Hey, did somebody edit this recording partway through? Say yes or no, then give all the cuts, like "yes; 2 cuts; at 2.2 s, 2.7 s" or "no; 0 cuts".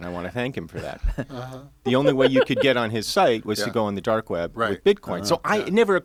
no; 0 cuts